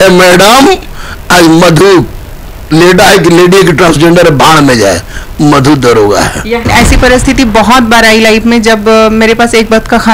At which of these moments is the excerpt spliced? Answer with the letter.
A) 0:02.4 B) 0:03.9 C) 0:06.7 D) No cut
C